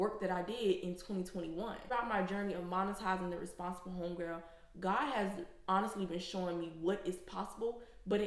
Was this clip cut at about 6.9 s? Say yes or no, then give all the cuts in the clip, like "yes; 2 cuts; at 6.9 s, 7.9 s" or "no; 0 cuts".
no; 1 cut; at 1.9 s